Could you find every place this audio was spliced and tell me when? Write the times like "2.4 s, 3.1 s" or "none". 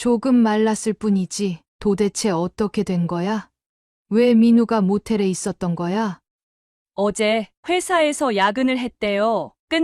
1.7 s, 6.2 s